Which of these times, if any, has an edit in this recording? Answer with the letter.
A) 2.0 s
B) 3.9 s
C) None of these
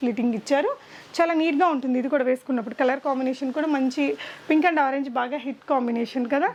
C